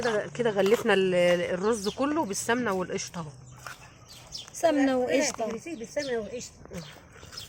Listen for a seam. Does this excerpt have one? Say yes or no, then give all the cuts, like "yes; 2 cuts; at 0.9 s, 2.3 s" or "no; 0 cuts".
no; 0 cuts